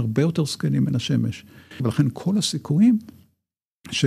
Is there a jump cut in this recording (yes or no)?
yes